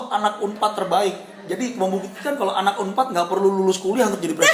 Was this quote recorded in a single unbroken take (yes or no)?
yes